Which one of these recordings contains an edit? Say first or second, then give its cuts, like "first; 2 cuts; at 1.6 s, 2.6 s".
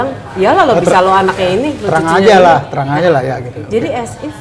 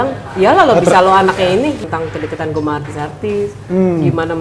second; 1 cut; at 1.8 s